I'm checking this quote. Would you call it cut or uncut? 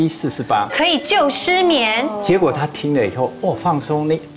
uncut